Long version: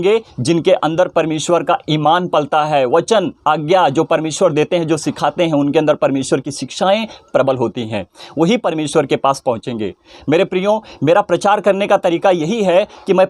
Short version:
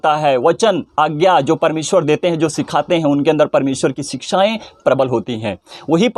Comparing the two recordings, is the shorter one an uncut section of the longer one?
yes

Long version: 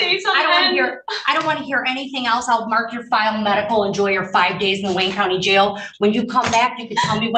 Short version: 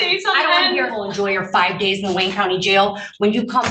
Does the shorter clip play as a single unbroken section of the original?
no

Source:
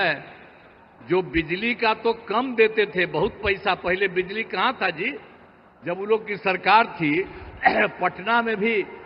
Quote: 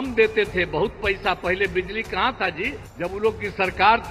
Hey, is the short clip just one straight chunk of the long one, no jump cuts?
no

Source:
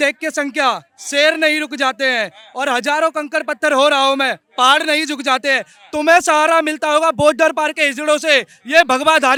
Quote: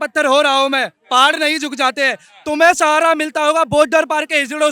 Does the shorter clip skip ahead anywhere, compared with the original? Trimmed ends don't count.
no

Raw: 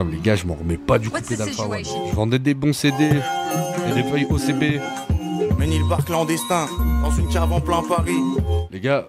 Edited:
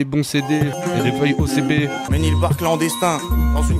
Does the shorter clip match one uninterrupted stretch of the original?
no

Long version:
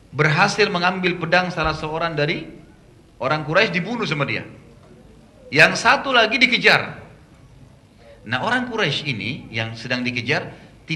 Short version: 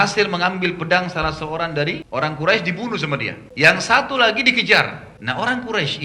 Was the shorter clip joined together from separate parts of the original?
yes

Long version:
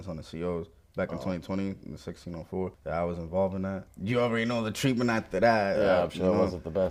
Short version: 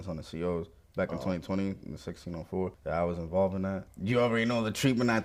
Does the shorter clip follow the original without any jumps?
yes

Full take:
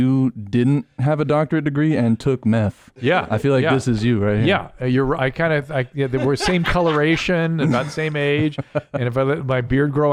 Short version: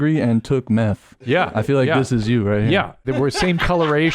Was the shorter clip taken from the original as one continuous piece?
no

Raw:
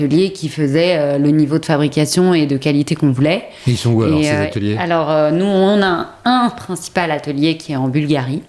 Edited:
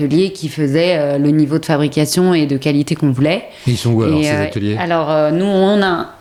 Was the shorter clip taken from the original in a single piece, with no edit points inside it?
yes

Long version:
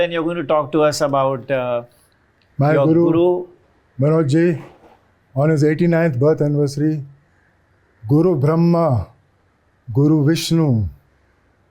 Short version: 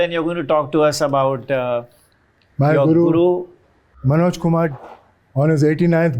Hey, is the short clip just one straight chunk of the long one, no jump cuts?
yes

